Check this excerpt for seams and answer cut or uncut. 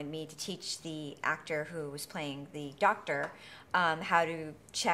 uncut